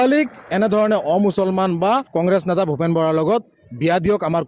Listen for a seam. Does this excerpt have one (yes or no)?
yes